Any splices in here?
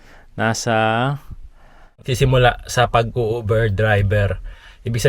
yes; 1 cut; at 2.0 s

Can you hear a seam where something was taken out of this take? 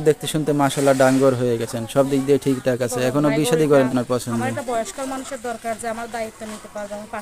yes; 1 cut; at 3.9 s

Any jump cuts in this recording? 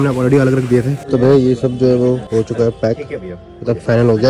yes; 2 cuts; at 1.0 s, 2.2 s

